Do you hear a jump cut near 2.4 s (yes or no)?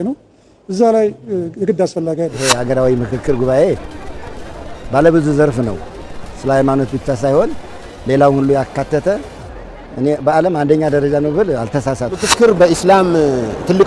yes